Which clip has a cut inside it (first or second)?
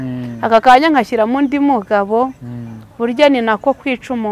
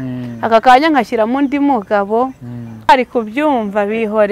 second